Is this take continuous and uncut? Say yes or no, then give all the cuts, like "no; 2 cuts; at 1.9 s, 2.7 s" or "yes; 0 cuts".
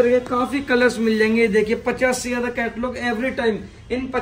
yes; 0 cuts